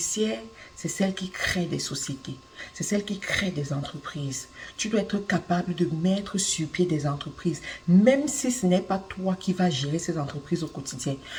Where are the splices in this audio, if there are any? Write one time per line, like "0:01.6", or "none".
none